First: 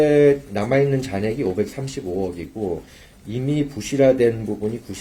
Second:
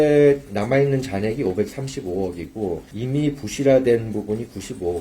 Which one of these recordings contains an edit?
second; 1 cut; at 2.9 s

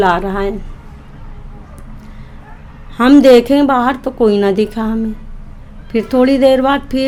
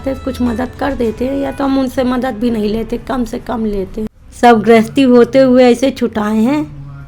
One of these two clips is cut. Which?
second; 1 cut; at 4.1 s

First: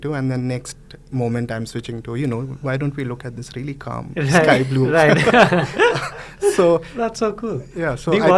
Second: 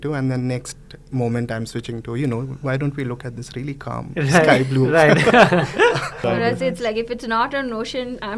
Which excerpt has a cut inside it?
second; 1 cut; at 6.2 s

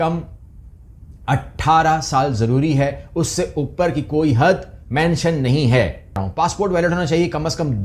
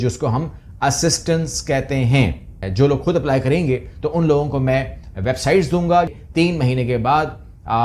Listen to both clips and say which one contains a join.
second; 2 cuts; at 2.6 s, 6.2 s

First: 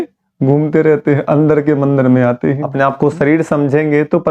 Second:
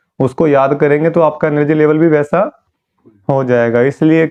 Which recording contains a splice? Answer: first; 1 cut; at 2.7 s

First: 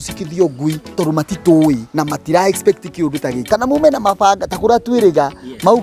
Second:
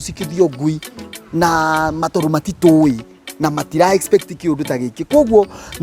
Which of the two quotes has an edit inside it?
first; 3 cuts; at 0.9 s, 1.9 s, 3.4 s

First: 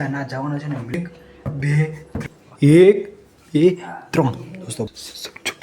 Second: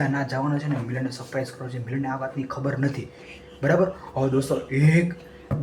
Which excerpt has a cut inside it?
first; 3 cuts; at 0.9 s, 2.2 s, 4.9 s

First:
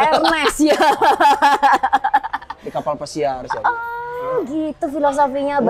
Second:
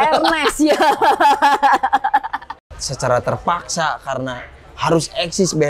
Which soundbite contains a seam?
second; 1 cut; at 2.7 s

